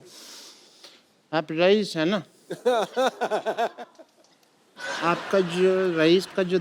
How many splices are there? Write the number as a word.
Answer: one